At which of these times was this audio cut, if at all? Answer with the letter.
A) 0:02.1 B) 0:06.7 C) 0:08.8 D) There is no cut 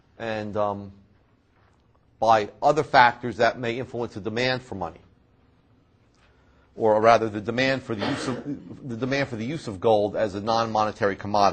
B